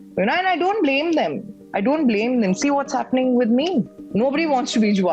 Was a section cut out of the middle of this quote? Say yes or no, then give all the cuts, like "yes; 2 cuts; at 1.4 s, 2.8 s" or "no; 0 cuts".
yes; 1 cut; at 4.0 s